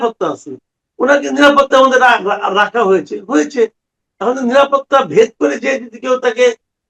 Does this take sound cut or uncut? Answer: uncut